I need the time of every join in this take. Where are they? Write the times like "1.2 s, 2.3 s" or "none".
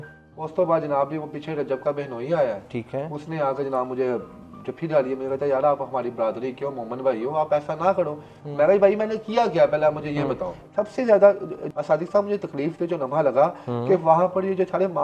10.6 s

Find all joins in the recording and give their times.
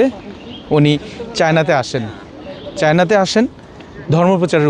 none

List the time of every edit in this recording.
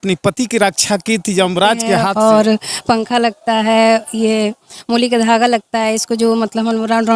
2.1 s

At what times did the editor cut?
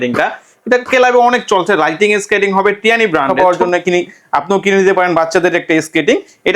3.3 s

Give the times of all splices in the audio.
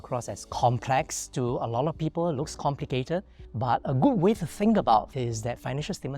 3.4 s, 5.1 s

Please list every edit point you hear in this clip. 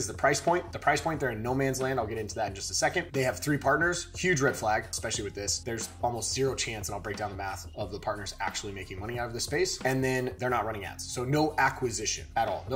none

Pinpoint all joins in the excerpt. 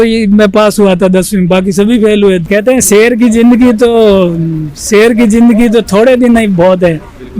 2.4 s

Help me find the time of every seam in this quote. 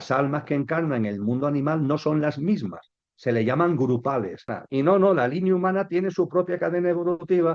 4.6 s

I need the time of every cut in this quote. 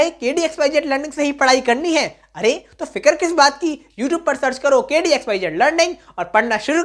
none

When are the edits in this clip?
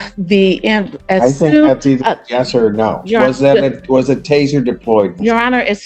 none

